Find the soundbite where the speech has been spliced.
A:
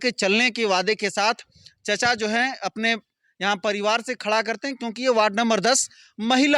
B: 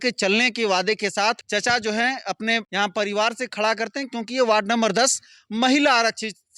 B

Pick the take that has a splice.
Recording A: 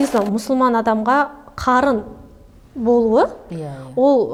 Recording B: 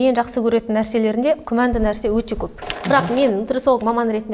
B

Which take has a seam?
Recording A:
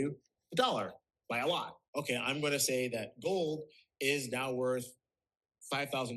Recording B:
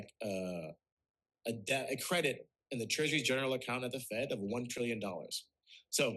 A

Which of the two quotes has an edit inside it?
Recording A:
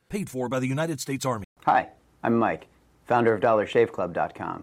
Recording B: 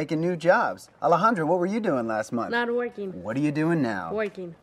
A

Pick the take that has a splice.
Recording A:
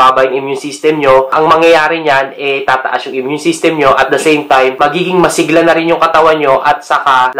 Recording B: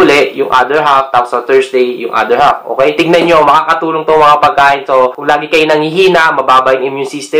B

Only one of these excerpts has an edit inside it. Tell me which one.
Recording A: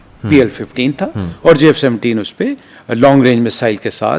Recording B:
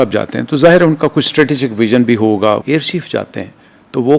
B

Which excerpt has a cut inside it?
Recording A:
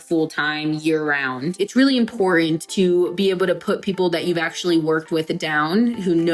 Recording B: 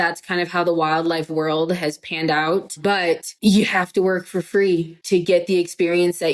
A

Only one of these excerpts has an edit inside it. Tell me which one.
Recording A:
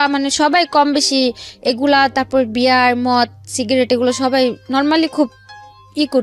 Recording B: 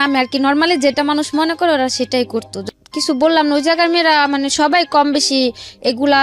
B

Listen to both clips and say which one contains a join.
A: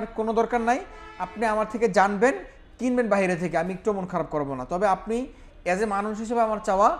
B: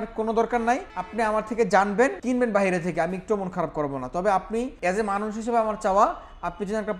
B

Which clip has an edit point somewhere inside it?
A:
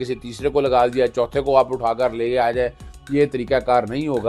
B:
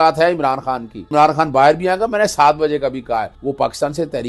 B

